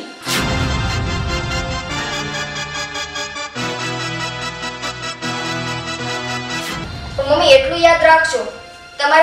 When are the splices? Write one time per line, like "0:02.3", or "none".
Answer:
0:06.8